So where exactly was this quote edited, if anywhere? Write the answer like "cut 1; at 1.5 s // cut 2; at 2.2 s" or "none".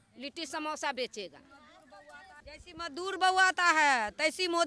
cut 1; at 2.3 s

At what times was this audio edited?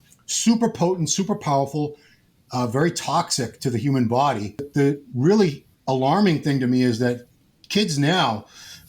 cut 1; at 4.7 s

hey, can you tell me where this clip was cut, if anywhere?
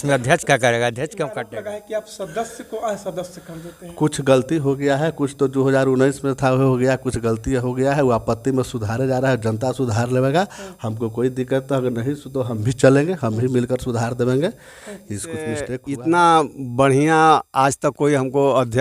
cut 1; at 1.4 s // cut 2; at 15.7 s

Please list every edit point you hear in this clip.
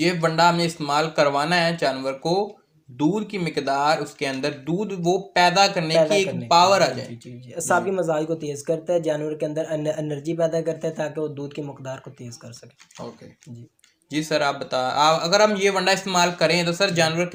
none

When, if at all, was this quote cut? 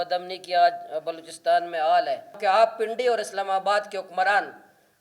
cut 1; at 2.4 s

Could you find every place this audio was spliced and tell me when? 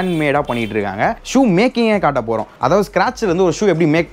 cut 1; at 1.2 s

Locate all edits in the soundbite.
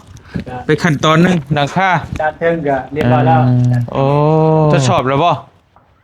cut 1; at 4.8 s

